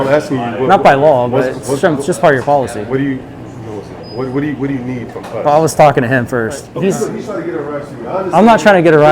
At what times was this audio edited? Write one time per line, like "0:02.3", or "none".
0:06.7